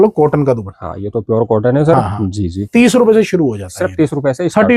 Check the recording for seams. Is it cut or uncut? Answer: uncut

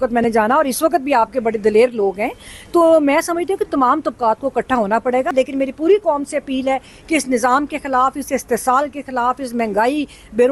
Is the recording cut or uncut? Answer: cut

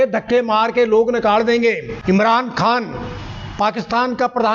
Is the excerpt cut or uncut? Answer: cut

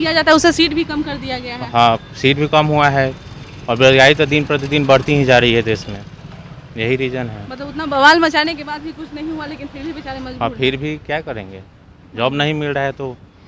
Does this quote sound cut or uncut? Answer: uncut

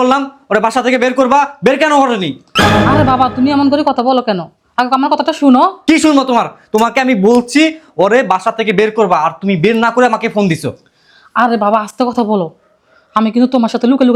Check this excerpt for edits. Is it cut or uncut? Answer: uncut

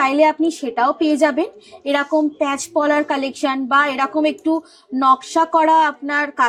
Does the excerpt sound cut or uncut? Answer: uncut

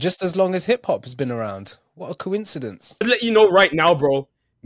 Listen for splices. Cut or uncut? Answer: cut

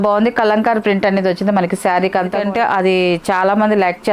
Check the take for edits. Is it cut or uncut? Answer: cut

